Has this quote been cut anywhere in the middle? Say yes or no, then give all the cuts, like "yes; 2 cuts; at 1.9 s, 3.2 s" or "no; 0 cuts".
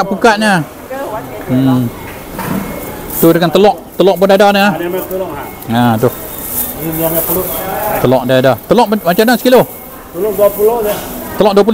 no; 0 cuts